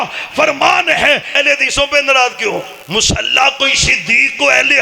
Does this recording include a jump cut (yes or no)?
yes